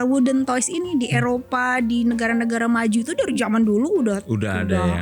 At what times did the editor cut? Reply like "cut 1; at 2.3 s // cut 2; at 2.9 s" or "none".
none